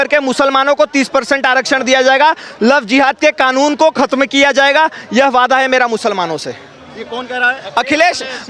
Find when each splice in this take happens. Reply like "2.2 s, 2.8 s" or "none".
none